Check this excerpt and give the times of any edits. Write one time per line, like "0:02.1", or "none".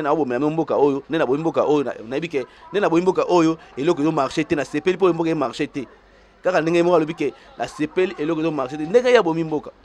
none

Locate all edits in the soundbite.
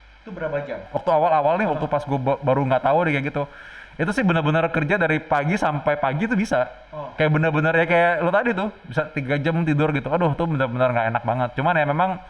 0:01.0

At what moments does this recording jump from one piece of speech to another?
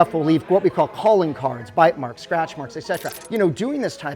0:03.2

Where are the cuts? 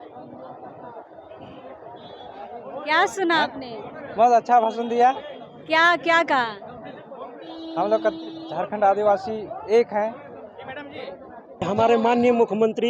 0:11.6

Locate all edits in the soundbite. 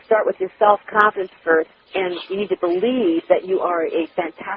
none

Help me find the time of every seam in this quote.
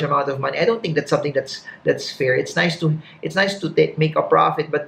none

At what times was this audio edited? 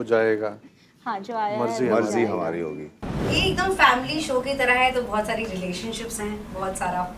0:03.2

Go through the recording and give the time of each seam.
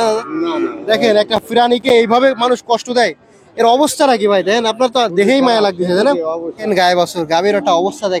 0:06.6

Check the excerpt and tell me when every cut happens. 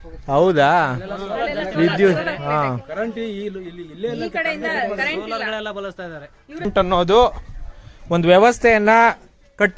0:06.7

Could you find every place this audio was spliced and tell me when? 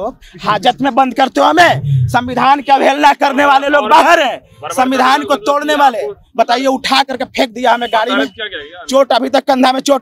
none

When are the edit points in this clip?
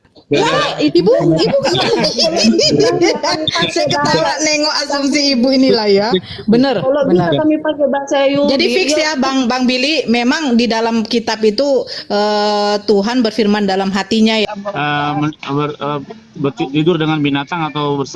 0:14.5

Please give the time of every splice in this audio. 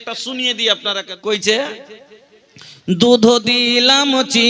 0:01.1

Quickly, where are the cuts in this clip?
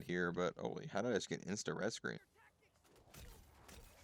0:02.2

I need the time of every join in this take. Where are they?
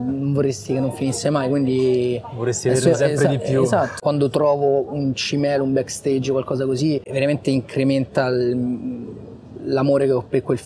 0:04.0
0:07.1

